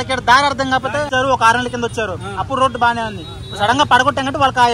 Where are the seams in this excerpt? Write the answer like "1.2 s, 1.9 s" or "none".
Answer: 1.1 s